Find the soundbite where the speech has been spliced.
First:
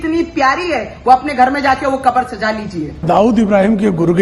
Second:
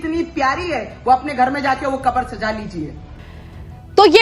first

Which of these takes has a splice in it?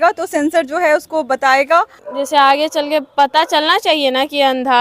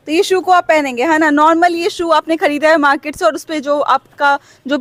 first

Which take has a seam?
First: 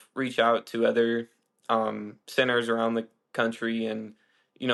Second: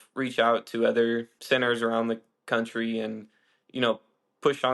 second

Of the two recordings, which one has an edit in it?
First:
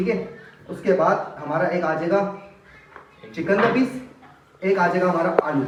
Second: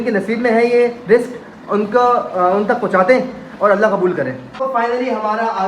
second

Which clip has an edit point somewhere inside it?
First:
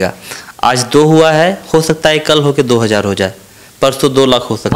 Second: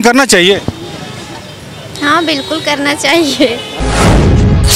second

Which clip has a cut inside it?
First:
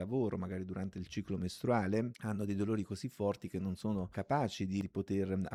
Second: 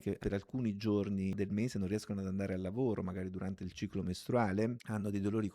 second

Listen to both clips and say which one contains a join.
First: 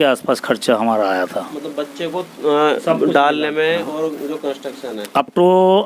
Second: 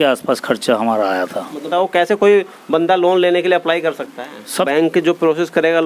second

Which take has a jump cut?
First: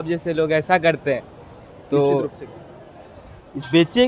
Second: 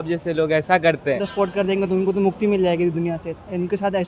second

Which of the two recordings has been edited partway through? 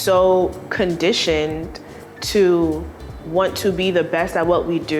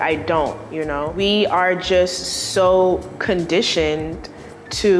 second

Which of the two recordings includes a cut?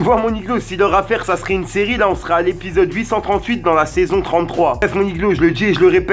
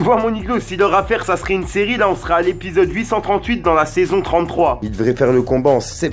second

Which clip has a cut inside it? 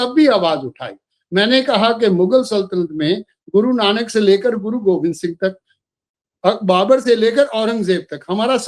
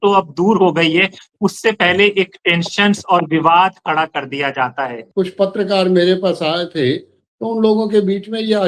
second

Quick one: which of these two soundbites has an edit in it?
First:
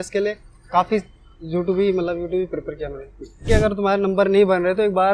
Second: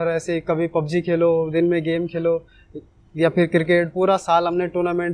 first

